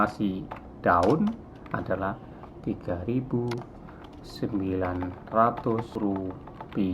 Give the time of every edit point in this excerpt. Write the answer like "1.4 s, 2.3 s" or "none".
5.9 s